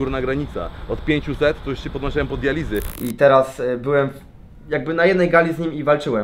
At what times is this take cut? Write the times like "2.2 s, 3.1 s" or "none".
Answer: 2.9 s